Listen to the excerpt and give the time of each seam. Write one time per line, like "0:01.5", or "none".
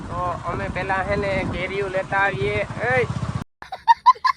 0:03.4